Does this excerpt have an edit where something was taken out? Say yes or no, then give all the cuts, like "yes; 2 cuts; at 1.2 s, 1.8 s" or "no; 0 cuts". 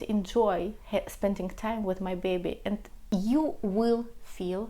yes; 1 cut; at 2.9 s